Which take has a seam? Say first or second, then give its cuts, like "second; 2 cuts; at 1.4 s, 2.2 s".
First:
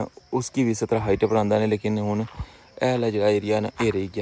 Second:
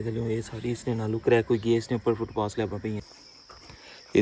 second; 1 cut; at 3.0 s